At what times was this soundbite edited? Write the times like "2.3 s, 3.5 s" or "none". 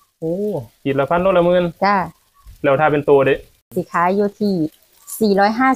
3.7 s